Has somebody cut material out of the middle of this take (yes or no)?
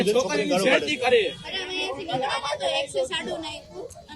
yes